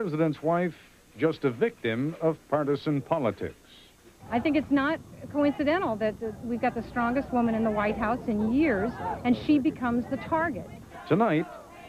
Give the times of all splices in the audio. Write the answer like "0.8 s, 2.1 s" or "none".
6.8 s